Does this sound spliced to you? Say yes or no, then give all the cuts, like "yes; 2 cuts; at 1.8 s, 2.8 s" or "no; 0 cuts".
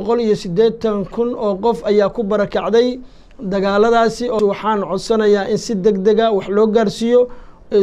yes; 1 cut; at 4.4 s